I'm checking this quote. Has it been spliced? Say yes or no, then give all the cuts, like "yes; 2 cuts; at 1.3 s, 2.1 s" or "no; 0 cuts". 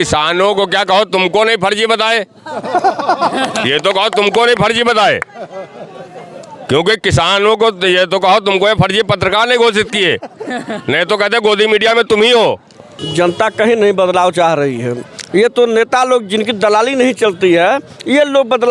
yes; 1 cut; at 13.0 s